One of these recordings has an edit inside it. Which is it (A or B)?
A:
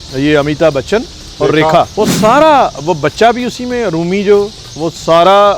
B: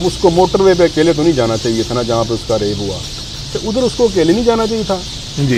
A